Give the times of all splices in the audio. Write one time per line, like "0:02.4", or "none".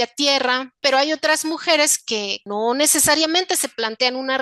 0:00.8
0:02.4

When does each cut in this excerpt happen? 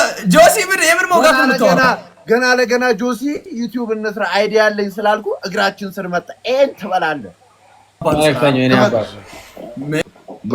0:08.0

